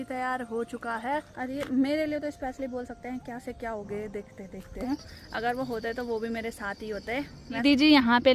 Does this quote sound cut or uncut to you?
cut